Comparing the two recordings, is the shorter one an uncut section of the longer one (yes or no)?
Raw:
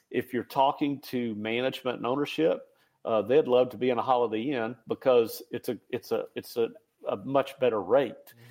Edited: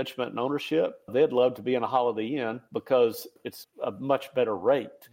no